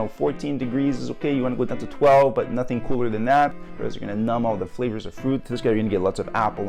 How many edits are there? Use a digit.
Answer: 1